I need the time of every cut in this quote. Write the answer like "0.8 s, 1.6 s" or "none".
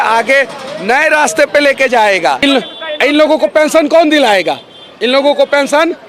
2.4 s

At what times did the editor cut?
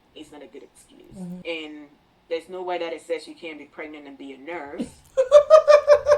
1.4 s

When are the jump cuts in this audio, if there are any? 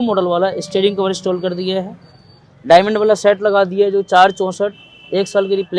none

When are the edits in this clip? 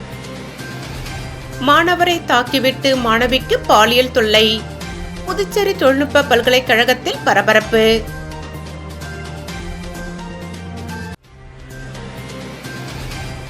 1.3 s

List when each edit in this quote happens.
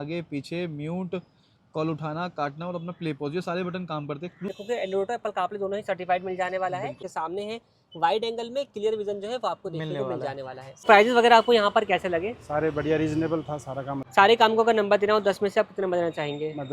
4.5 s, 7.0 s, 10.8 s, 13.9 s

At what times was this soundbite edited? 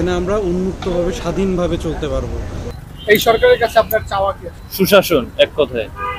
none

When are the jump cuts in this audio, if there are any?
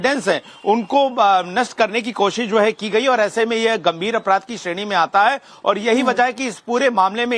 2.4 s

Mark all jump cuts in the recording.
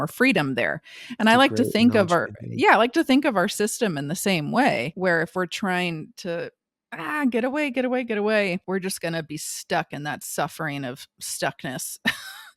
4.9 s, 8.6 s

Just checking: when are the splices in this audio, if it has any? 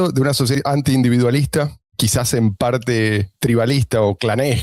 2.0 s, 3.3 s

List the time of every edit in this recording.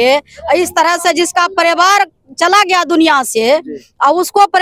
none

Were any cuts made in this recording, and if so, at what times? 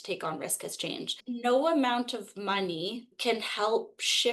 1.2 s, 3.1 s

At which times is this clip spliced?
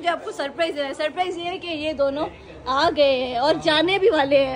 none

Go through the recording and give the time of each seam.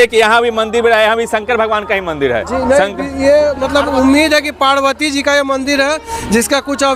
none

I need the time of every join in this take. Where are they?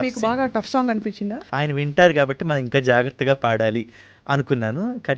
1.5 s

